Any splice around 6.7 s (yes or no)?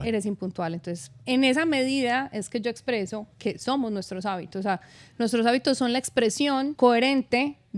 yes